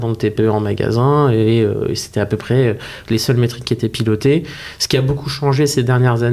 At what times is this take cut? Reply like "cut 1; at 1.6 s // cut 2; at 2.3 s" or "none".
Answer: none

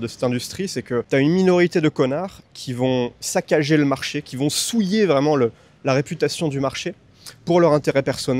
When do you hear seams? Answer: cut 1; at 1.1 s

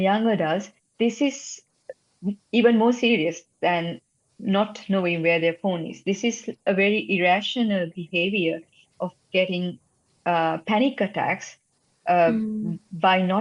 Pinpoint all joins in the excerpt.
none

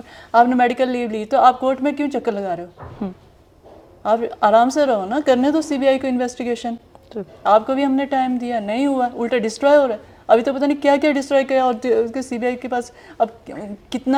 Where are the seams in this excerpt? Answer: none

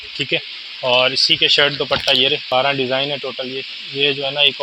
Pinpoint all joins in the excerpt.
cut 1; at 2.4 s

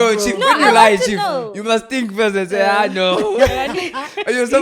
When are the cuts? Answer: none

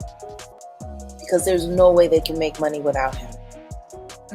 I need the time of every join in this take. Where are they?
cut 1; at 1.0 s

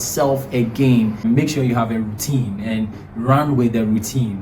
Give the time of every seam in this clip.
cut 1; at 1.2 s

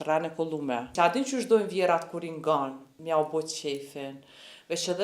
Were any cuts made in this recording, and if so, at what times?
cut 1; at 0.9 s // cut 2; at 2.9 s

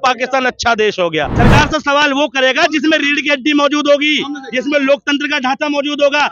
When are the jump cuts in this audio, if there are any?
cut 1; at 1.3 s

